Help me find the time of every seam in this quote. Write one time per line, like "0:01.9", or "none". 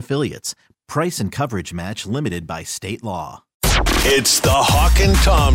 0:03.5